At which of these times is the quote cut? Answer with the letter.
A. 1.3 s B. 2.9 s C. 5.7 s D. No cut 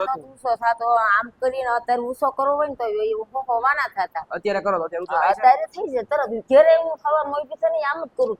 D